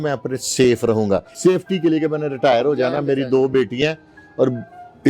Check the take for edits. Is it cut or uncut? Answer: cut